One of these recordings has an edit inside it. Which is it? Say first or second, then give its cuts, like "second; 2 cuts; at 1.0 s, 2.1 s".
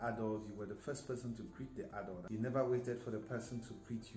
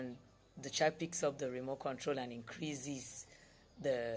first; 1 cut; at 2.2 s